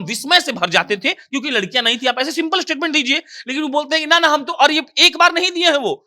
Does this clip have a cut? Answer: no; 0 cuts

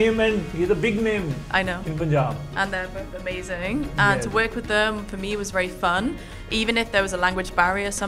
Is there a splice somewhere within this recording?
no; 0 cuts

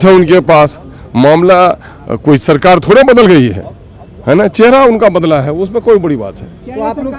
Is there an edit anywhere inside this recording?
no; 0 cuts

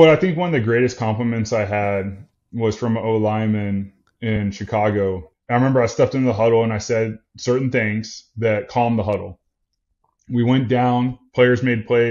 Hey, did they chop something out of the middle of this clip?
yes; 1 cut; at 5.3 s

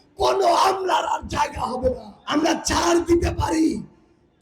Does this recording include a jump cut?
yes; 1 cut; at 2.1 s

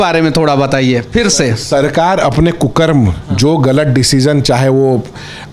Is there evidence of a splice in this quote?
no; 0 cuts

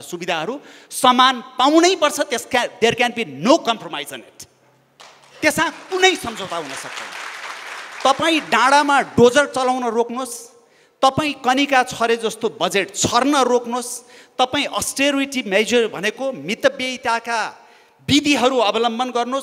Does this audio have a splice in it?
no; 0 cuts

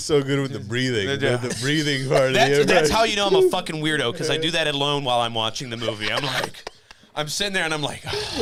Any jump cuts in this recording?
no; 0 cuts

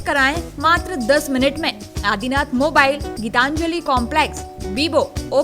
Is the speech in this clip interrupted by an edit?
no; 0 cuts

